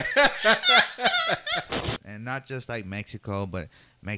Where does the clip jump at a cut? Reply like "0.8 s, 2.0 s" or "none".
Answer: 1.8 s